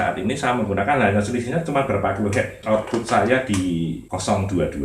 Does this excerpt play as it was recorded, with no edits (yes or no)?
no